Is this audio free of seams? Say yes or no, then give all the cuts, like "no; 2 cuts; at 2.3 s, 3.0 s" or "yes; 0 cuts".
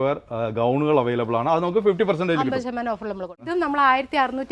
no; 1 cut; at 3.4 s